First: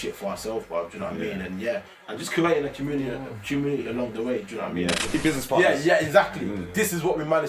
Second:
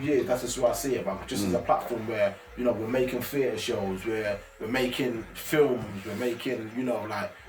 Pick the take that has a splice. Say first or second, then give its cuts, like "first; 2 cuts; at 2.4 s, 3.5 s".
first; 1 cut; at 5.1 s